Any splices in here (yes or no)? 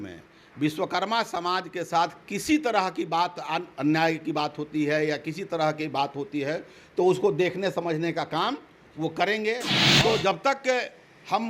yes